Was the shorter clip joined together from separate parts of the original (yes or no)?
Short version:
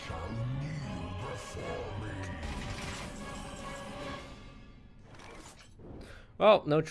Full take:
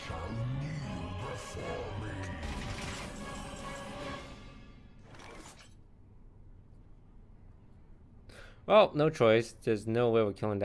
yes